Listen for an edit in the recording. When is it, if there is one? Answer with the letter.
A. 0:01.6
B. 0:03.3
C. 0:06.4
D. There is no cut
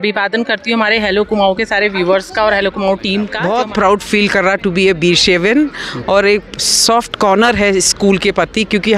B